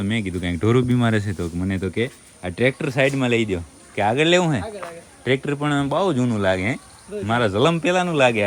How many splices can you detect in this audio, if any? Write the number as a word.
zero